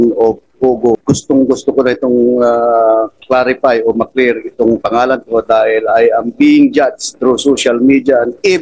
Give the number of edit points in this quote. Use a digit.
2